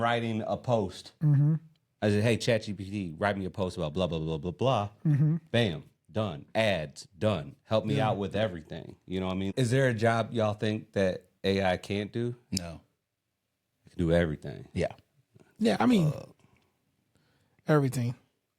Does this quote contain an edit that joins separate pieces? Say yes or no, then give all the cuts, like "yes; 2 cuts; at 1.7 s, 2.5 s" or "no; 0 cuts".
yes; 1 cut; at 9.5 s